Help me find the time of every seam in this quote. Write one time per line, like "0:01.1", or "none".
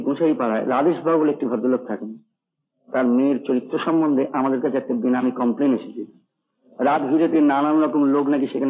none

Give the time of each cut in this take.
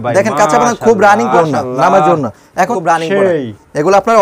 0:01.3
0:02.7

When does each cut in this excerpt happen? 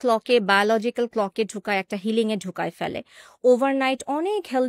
none

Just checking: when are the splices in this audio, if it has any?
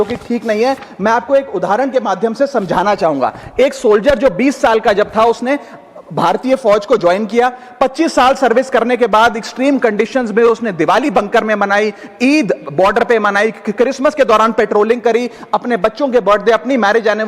none

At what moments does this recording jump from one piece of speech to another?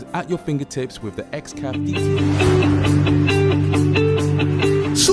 0:01.7

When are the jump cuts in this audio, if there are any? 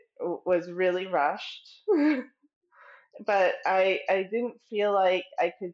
none

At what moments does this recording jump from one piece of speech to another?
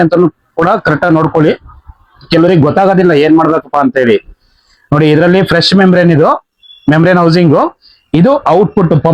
none

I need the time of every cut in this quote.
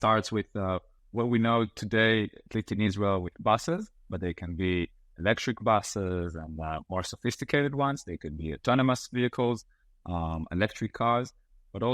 0:01.0

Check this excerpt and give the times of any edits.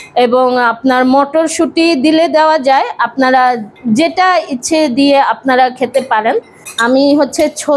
0:06.6

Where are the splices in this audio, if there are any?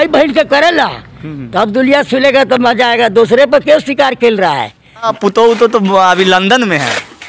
0:05.1

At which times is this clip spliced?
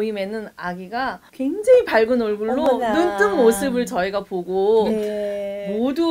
none

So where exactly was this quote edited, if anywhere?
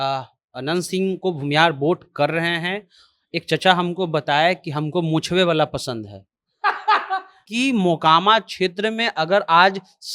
0:07.4

